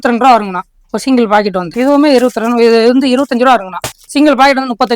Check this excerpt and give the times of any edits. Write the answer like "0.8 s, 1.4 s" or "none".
3.9 s